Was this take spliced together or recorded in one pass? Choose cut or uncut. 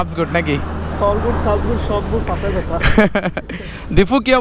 uncut